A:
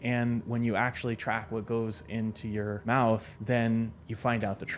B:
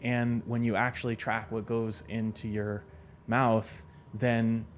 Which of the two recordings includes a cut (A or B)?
A